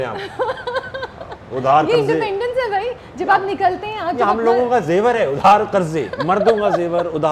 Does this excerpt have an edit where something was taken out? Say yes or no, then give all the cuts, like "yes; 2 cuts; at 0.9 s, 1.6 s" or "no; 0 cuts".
no; 0 cuts